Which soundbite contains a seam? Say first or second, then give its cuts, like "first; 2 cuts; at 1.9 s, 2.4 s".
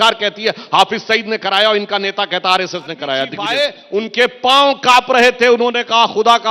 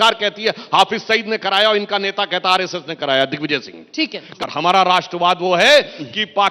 first; 1 cut; at 3.4 s